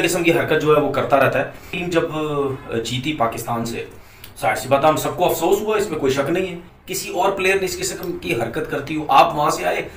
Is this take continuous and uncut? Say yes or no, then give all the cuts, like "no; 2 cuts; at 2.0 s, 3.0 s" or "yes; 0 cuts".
no; 1 cut; at 1.8 s